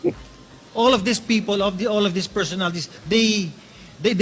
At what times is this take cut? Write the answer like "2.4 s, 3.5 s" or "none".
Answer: 3.0 s